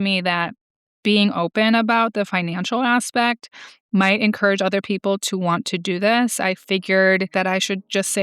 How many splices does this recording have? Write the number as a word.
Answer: one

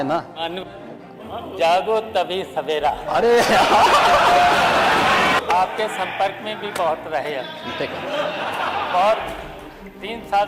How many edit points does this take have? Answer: one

